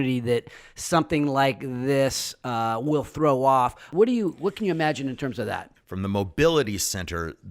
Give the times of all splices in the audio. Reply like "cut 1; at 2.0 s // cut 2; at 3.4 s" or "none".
cut 1; at 3.8 s // cut 2; at 5.8 s